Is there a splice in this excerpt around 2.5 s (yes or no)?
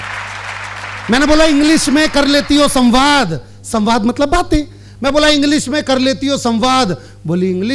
no